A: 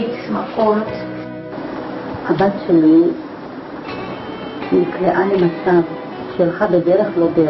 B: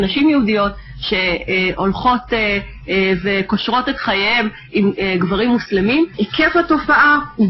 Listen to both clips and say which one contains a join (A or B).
B